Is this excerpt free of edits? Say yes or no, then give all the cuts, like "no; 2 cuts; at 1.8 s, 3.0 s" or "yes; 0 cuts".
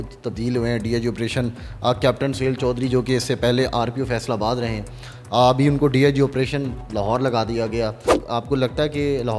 no; 1 cut; at 8.2 s